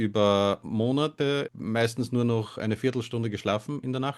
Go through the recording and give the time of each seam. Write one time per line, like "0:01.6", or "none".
0:01.3